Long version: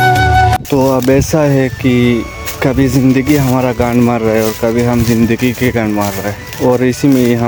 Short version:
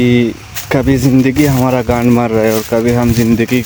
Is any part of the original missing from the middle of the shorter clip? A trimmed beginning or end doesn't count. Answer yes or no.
no